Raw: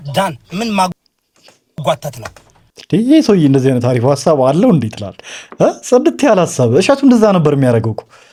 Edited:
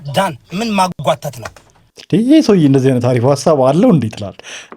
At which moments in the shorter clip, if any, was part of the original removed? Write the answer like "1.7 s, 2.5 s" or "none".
1.0 s

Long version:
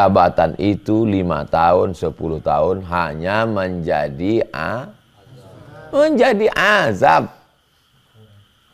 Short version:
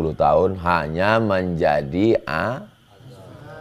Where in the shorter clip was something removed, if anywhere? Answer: none

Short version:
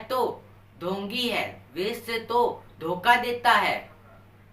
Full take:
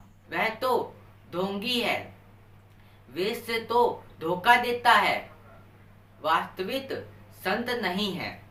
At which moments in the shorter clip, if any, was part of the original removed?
1.6 s

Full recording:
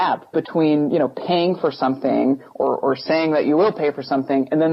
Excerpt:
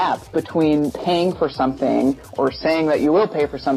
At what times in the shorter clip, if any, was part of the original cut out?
0.9 s, 2.3 s

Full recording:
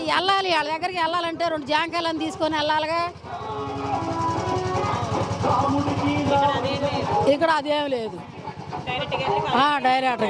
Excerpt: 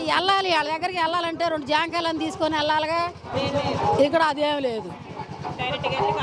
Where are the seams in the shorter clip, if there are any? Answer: 3.3 s

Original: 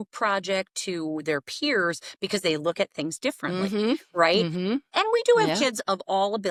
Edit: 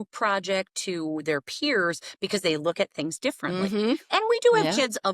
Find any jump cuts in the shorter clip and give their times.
4.0 s

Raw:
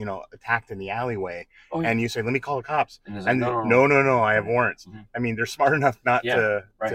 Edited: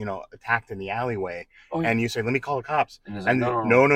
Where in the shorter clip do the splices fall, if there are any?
none

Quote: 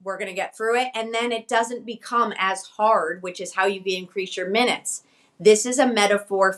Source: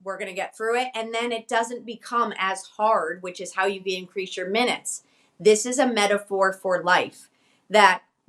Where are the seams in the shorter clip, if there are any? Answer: none

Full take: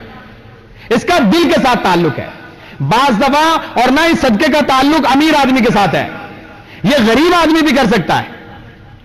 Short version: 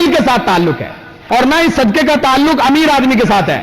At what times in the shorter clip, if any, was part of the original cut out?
1.2 s

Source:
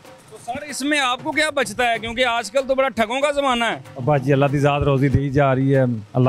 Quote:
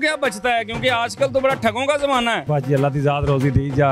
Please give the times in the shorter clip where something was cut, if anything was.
2.4 s

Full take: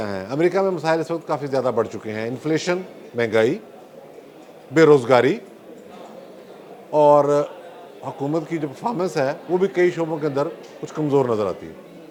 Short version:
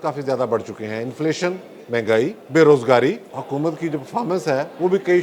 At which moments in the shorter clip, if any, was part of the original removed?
2.4 s, 3.3 s

